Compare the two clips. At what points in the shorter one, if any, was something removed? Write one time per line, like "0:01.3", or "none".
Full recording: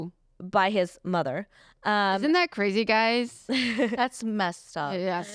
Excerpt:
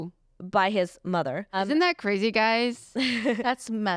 0:01.6